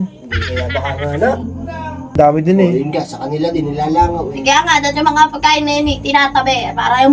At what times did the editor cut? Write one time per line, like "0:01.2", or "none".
0:02.1